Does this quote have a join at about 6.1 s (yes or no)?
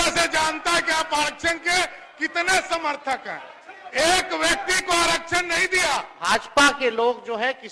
yes